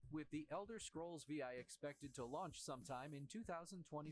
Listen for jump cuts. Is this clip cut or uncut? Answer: uncut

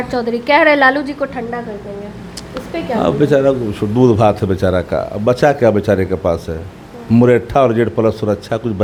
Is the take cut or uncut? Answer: uncut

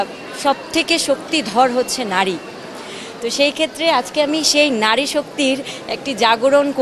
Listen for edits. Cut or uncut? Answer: uncut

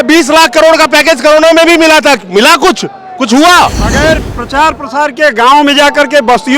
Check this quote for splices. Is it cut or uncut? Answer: cut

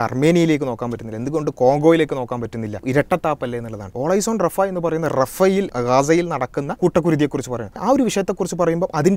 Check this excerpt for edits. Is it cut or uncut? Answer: cut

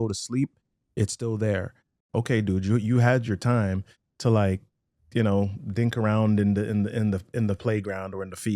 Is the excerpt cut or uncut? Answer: cut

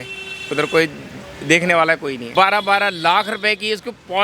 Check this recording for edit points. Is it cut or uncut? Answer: cut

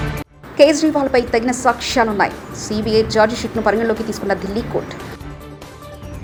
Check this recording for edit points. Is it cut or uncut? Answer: uncut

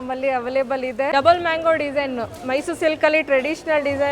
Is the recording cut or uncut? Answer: cut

